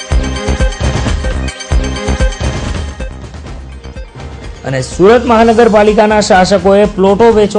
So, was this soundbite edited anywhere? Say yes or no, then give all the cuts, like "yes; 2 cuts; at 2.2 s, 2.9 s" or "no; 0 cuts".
yes; 1 cut; at 4.3 s